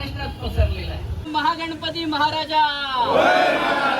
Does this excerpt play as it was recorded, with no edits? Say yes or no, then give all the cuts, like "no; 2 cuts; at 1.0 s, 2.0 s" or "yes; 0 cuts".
no; 1 cut; at 1.2 s